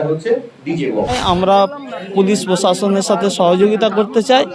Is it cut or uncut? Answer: cut